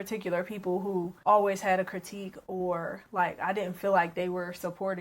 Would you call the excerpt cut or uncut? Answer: cut